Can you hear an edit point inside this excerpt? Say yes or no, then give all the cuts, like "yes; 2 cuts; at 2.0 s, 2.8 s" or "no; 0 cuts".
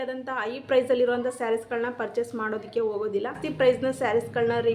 yes; 1 cut; at 3.4 s